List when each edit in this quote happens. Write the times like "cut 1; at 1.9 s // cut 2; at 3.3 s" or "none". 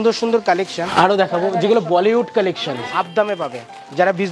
cut 1; at 0.9 s // cut 2; at 2.9 s